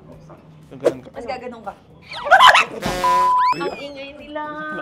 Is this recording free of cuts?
no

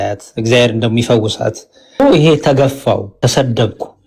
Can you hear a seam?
yes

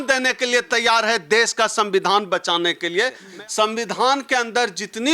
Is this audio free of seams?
no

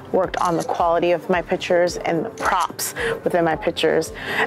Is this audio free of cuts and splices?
yes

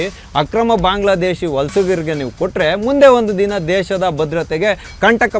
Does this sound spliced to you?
no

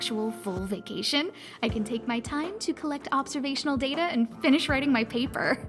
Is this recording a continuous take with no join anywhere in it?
yes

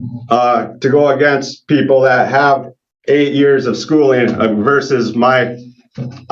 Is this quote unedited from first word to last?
yes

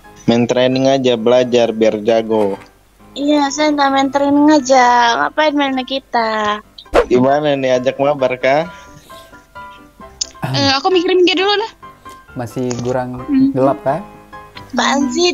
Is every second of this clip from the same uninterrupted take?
no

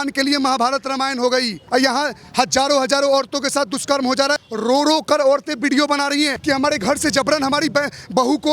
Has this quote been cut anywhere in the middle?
yes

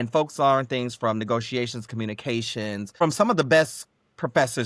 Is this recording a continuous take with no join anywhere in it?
no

